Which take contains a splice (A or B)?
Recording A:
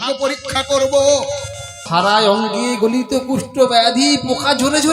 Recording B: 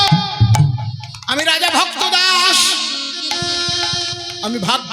A